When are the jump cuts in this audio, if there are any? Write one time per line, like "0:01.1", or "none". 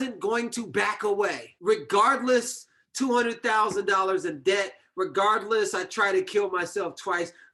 0:01.5